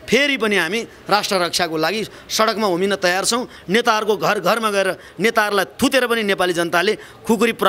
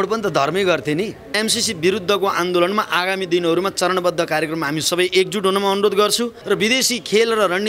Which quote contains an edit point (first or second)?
second